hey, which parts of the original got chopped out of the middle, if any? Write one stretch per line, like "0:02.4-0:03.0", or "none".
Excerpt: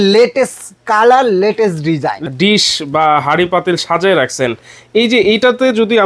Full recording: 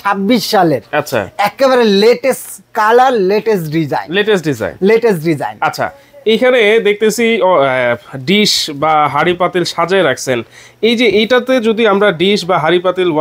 0:04.1-0:08.1